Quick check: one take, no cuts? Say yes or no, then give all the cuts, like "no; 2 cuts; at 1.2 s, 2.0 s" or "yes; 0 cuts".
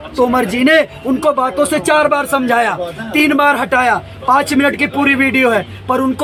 yes; 0 cuts